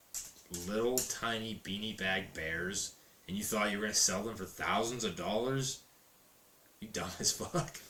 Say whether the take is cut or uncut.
uncut